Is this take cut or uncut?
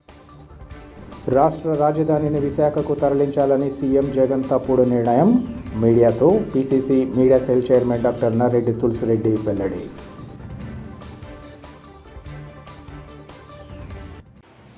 uncut